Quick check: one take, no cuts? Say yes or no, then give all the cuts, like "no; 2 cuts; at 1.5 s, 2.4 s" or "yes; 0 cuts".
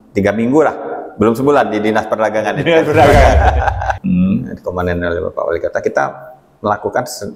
no; 1 cut; at 3.9 s